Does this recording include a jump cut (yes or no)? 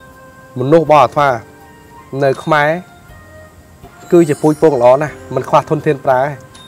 no